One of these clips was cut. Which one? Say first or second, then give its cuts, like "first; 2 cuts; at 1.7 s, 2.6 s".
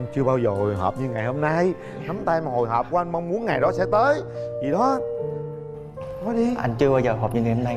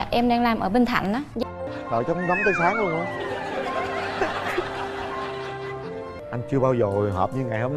second; 1 cut; at 1.3 s